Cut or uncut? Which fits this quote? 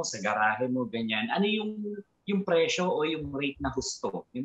uncut